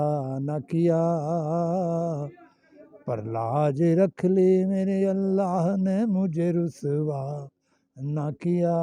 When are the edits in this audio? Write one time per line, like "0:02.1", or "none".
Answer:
none